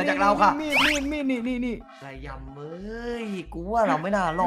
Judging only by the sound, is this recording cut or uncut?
cut